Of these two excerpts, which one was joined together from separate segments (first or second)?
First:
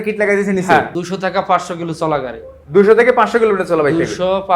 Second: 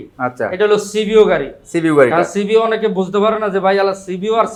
first